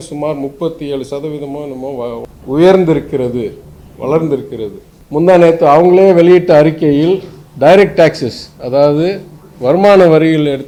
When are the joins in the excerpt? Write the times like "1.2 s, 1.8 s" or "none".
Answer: none